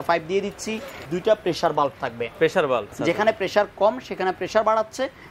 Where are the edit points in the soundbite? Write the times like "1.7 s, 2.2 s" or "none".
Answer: 1.1 s, 3.0 s